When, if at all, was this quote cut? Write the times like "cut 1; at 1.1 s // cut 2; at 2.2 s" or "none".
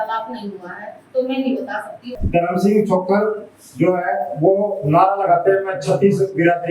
cut 1; at 2.1 s